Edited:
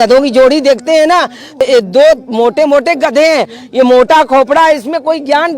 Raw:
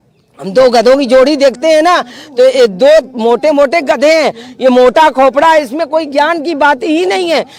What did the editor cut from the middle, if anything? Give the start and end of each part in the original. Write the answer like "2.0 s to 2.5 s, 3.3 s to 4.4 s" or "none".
2.4 s to 2.5 s